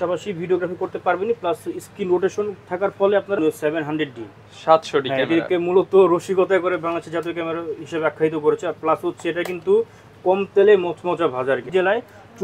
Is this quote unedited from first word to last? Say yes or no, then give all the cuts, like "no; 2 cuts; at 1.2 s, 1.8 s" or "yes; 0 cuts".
no; 2 cuts; at 3.4 s, 11.6 s